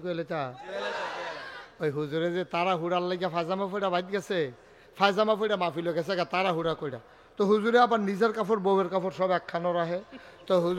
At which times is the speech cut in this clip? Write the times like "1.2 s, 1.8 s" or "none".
none

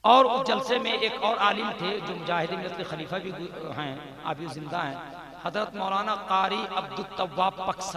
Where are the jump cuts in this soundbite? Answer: none

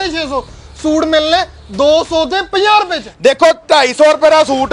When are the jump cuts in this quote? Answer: none

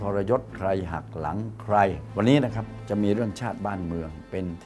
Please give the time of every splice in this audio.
2.0 s

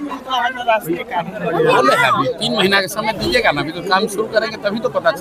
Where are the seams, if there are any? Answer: none

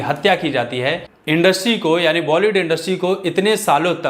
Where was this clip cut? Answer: 1.1 s

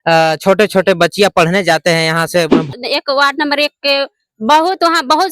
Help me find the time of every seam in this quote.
2.7 s

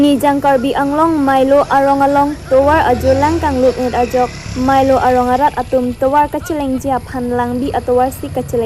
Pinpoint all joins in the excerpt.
none

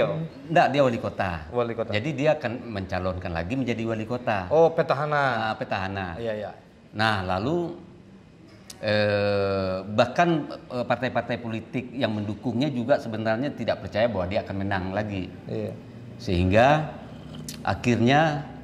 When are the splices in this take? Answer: none

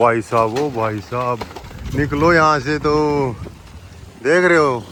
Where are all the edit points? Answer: none

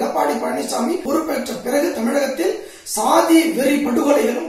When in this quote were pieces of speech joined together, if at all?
1.0 s

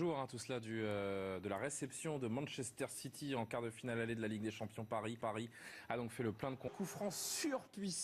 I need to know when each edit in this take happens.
none

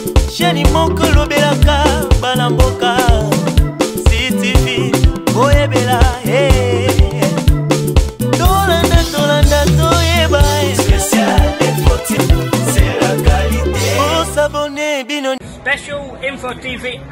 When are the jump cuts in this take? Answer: none

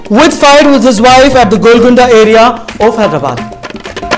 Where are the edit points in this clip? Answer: none

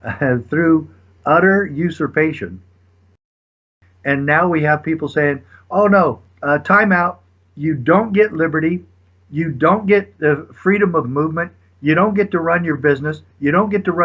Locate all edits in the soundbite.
3.4 s

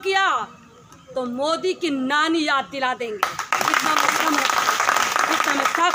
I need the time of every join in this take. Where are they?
none

